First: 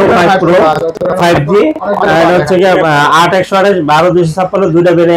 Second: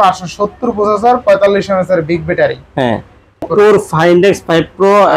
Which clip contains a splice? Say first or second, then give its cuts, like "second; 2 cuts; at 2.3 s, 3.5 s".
second; 1 cut; at 3.5 s